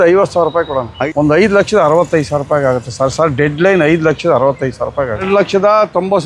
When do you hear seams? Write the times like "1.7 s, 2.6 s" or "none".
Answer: 0.9 s, 5.2 s